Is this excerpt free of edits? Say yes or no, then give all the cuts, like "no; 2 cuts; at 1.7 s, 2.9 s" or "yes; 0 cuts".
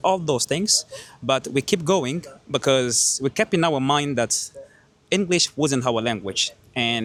yes; 0 cuts